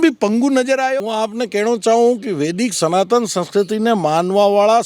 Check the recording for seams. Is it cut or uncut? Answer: cut